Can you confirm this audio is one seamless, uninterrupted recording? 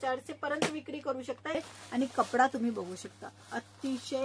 no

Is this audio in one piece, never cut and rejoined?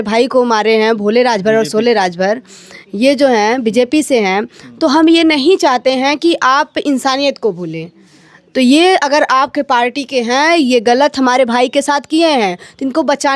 yes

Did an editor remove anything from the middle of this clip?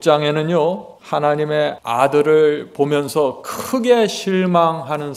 yes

